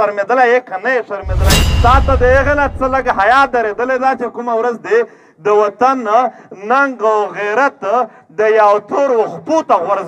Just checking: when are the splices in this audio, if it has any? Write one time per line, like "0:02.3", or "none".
0:01.6